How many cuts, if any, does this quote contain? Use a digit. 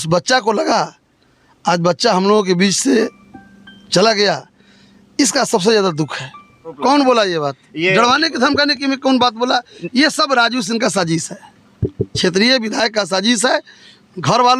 1